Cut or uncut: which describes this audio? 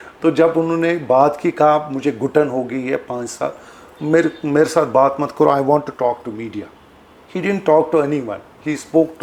uncut